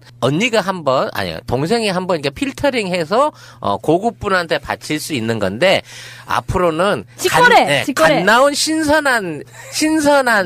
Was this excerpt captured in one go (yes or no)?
yes